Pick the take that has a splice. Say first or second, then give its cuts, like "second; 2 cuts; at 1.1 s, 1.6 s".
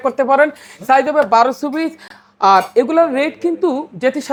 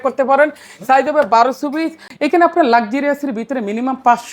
second; 1 cut; at 2.1 s